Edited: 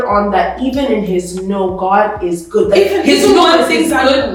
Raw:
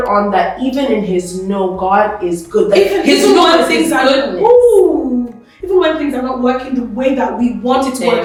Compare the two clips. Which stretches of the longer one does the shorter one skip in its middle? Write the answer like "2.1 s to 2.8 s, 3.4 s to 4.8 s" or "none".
none

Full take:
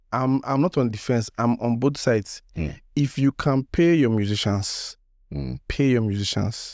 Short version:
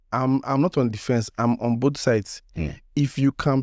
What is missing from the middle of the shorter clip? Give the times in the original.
none

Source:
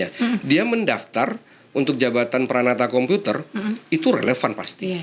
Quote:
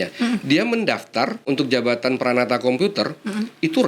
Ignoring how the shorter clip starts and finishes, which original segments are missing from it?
1.4 s to 1.7 s

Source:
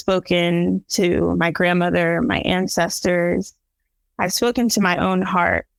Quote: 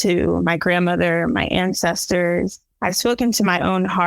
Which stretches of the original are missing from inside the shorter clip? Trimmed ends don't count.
3.6 s to 4.0 s

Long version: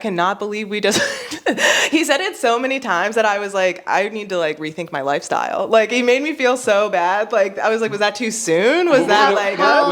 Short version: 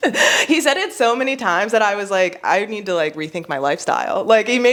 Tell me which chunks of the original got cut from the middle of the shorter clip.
none

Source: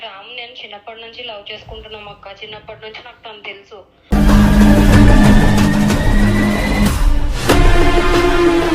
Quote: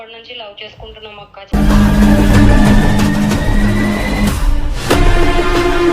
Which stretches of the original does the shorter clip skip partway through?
2.3 s to 4.0 s

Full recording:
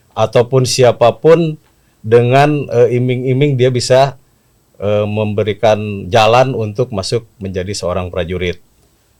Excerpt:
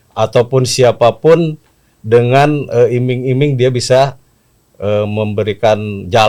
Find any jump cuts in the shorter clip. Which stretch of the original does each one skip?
none

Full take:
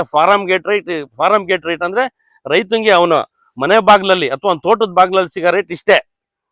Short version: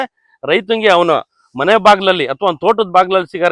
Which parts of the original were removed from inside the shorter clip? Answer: none

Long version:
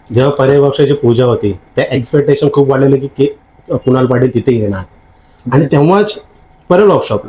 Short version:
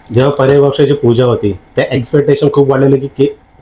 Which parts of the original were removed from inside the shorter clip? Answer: none

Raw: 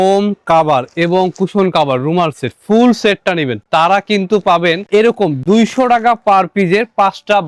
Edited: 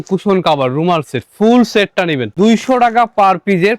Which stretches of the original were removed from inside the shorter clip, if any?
3.6 s to 5.4 s

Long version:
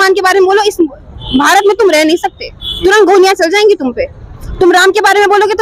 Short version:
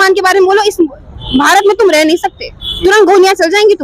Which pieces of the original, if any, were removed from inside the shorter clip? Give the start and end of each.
none

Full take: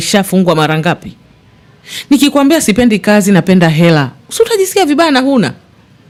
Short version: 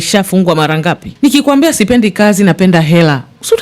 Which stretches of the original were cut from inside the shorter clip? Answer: 1.1 s to 1.9 s

